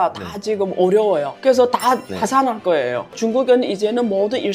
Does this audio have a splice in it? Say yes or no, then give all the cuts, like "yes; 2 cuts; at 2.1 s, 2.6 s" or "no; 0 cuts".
yes; 1 cut; at 3.1 s